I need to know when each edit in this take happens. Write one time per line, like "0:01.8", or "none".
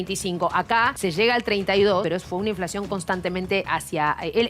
0:01.0
0:02.0
0:03.7